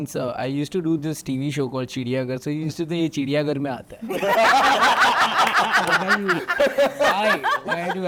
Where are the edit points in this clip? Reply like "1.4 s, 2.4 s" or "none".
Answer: none